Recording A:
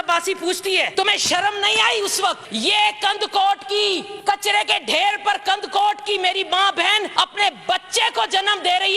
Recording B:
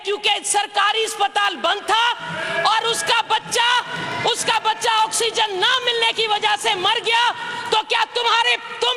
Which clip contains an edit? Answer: A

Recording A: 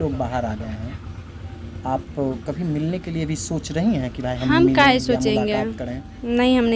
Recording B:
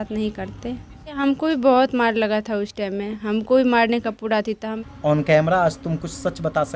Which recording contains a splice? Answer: B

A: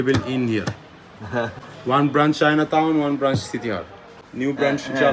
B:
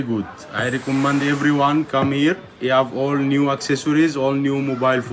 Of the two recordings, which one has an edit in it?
A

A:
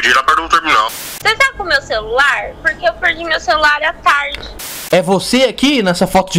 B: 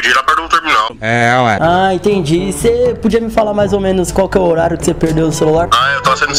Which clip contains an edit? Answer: A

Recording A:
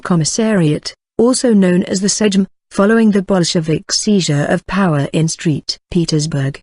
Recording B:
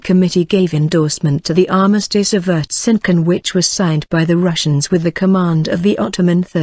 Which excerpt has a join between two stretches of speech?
B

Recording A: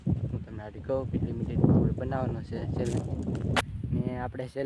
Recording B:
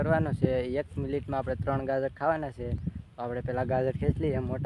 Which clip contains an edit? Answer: A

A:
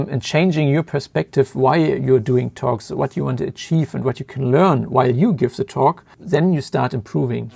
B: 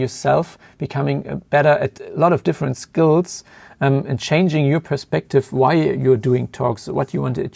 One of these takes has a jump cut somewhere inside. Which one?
A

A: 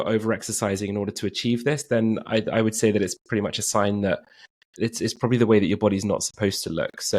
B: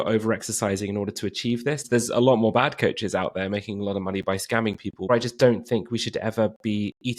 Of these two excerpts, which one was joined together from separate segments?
B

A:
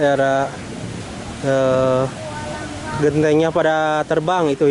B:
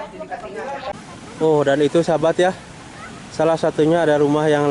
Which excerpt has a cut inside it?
B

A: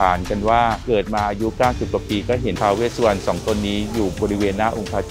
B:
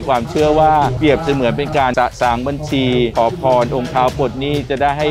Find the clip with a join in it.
B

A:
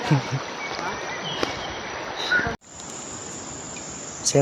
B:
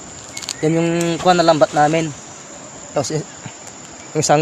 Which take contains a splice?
A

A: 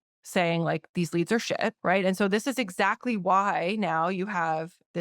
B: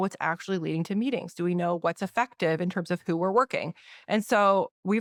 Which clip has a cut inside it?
A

